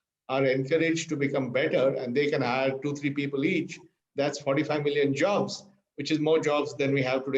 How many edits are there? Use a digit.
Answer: 0